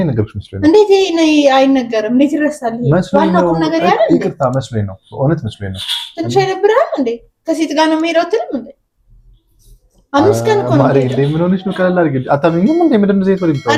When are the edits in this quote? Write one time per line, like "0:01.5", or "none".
none